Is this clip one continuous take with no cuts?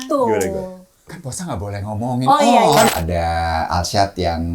no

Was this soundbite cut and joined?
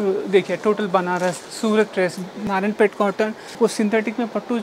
yes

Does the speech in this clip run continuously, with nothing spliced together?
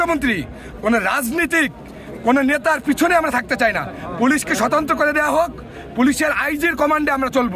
yes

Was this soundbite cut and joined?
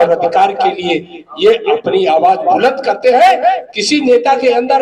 yes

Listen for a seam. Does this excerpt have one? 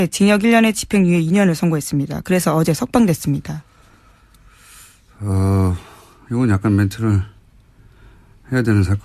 no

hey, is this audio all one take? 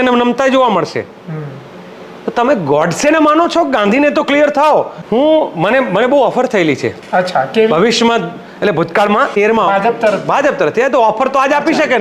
no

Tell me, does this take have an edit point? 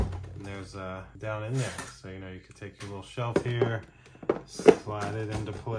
yes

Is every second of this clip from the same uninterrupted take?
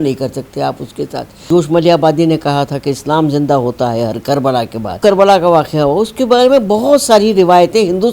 no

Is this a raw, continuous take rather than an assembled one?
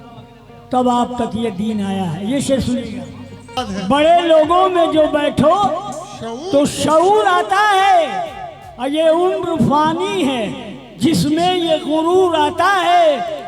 no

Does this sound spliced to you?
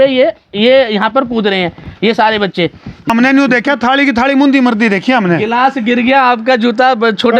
yes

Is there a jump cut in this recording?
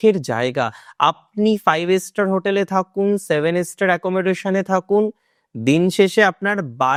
no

